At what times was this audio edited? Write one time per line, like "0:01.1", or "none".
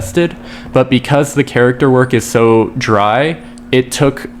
none